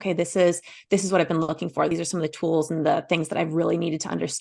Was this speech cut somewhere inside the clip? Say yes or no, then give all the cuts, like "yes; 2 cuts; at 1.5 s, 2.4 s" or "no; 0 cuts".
yes; 1 cut; at 1.9 s